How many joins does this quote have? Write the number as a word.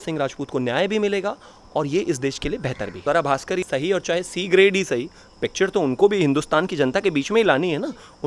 two